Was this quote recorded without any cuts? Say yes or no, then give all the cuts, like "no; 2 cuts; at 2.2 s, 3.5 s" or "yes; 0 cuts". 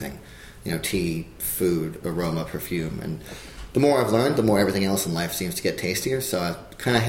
yes; 0 cuts